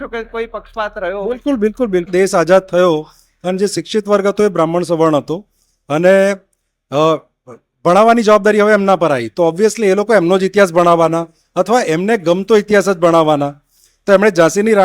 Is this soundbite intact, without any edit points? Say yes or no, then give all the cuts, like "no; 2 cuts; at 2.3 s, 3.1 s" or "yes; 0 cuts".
no; 1 cut; at 2.1 s